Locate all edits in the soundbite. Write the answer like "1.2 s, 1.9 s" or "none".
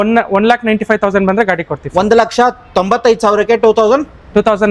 none